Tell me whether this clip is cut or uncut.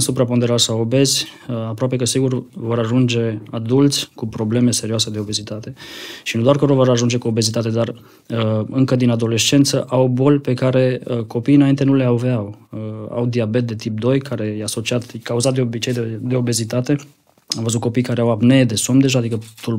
uncut